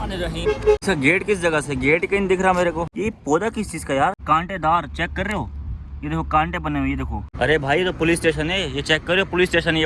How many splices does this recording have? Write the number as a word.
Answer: four